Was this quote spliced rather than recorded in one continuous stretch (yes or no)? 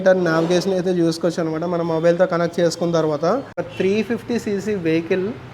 yes